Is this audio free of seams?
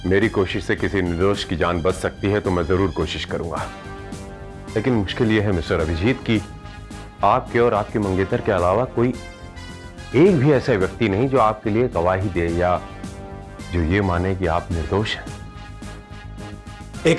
yes; 0 cuts

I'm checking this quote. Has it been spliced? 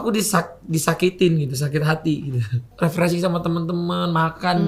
yes; 1 cut; at 2.7 s

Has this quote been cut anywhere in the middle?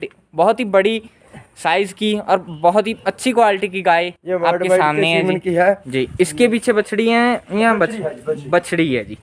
yes; 1 cut; at 5.9 s

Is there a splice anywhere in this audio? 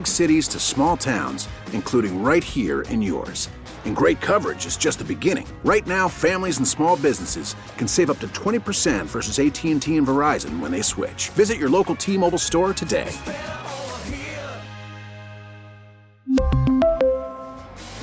no; 0 cuts

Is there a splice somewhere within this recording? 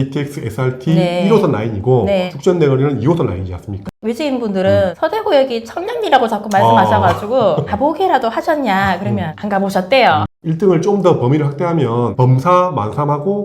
yes; 2 cuts; at 4.0 s, 10.4 s

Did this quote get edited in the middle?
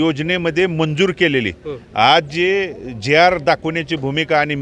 no; 0 cuts

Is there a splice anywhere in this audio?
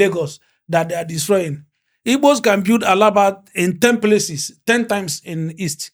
no; 0 cuts

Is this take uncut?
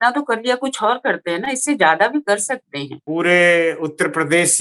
no; 1 cut; at 3.0 s

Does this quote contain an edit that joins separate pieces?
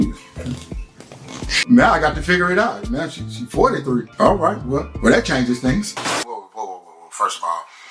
yes; 1 cut; at 6.0 s

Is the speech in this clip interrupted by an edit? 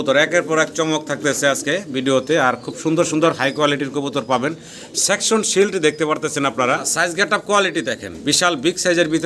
yes; 1 cut; at 6.9 s

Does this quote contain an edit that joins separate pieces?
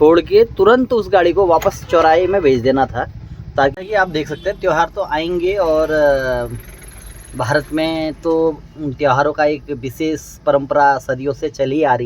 yes; 1 cut; at 3.7 s

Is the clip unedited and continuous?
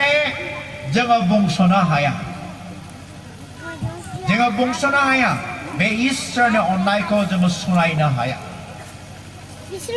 yes; 0 cuts

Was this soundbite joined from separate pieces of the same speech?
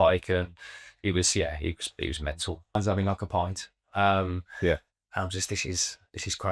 yes; 1 cut; at 2.8 s

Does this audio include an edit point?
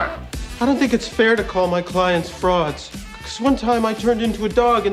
no; 0 cuts

